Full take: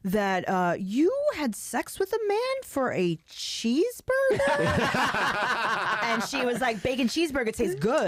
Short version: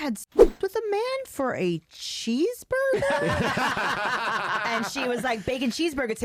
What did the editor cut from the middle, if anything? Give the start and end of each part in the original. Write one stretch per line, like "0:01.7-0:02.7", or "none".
none